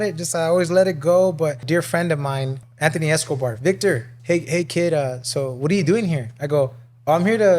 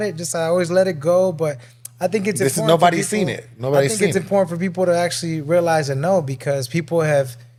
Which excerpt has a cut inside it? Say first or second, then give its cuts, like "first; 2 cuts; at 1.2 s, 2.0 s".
first; 3 cuts; at 1.6 s, 2.6 s, 4.1 s